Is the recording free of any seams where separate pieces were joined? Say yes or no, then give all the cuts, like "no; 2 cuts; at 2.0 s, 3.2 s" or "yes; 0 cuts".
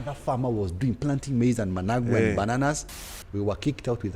no; 1 cut; at 2.9 s